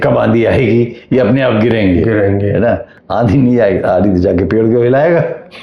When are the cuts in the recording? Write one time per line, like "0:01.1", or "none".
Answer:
0:02.9